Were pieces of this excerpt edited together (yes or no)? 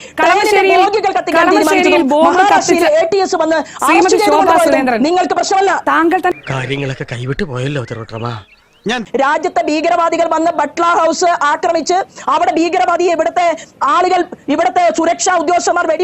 no